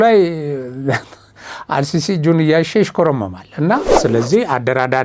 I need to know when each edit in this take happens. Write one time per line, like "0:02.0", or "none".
0:03.9